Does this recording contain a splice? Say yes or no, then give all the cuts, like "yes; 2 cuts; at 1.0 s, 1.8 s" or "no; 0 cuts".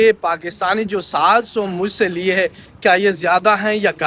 no; 0 cuts